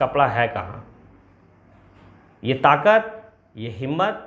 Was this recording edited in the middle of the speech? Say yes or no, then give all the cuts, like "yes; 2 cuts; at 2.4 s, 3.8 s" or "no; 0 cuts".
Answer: no; 0 cuts